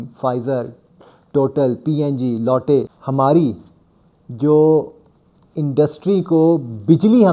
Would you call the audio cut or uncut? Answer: cut